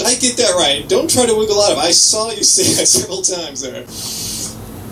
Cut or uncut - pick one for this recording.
uncut